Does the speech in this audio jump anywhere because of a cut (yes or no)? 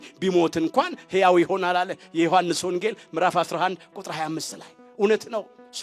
no